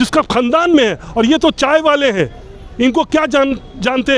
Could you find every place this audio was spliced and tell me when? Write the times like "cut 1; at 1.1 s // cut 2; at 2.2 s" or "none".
none